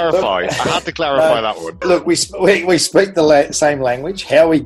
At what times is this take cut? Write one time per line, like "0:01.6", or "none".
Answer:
0:01.8